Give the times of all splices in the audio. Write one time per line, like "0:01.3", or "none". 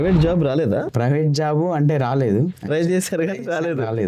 0:00.9